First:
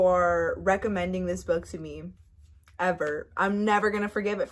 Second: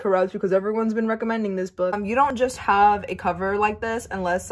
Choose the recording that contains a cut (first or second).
second